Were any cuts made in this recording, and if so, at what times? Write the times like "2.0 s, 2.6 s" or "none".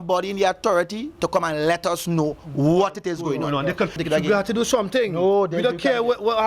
4.0 s